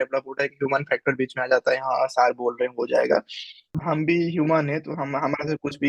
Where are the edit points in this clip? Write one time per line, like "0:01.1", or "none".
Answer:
0:03.8